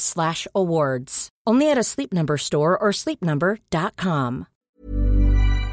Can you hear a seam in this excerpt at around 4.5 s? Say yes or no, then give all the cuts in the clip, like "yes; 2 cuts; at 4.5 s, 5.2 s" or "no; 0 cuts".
yes; 1 cut; at 4.5 s